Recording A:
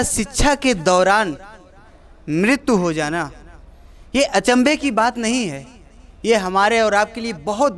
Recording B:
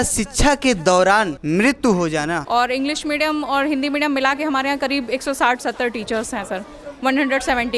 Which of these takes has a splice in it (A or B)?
B